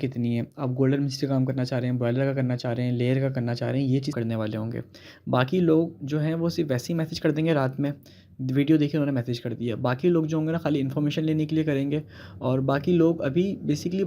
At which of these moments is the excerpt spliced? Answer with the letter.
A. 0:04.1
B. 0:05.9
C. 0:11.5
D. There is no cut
A